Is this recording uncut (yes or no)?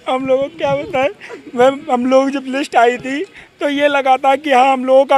yes